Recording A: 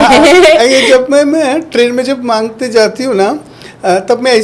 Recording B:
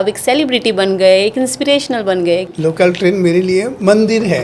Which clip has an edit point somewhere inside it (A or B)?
B